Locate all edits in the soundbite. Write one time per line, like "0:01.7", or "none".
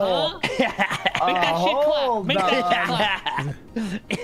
none